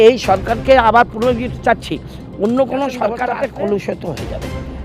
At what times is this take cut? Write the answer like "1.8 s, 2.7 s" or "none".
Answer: 3.1 s

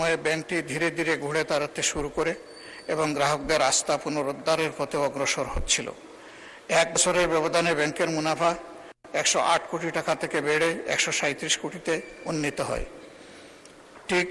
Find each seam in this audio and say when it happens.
none

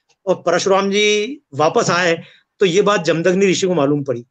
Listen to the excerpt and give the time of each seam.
none

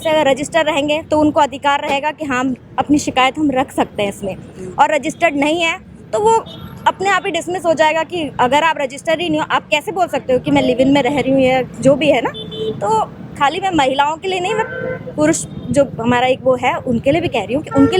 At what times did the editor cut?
none

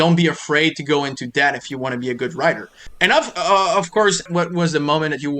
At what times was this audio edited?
2.9 s, 4.3 s

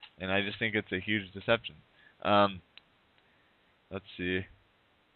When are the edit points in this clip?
2.1 s

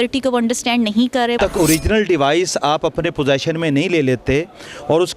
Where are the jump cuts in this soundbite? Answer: 1.4 s

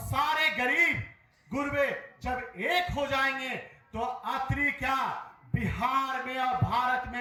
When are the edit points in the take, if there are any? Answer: none

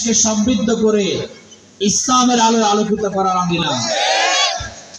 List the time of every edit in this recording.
3.6 s

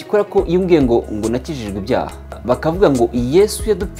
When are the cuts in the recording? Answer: 2.4 s

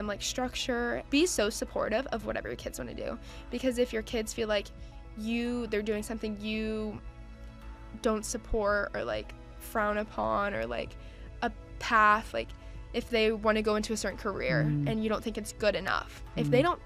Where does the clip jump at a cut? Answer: 1.0 s

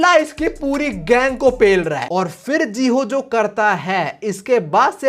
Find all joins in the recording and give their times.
2.1 s

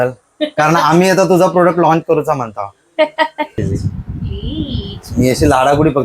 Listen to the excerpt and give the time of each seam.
3.6 s

